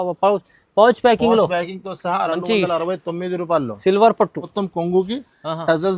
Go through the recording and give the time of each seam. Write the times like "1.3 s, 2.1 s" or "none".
4.5 s